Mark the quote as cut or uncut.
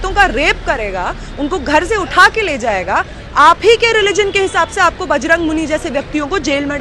uncut